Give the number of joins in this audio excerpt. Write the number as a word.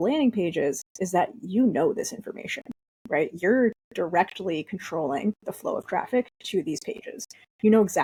zero